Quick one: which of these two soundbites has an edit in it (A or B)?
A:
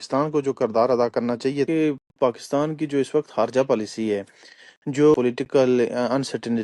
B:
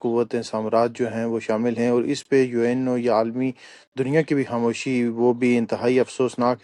A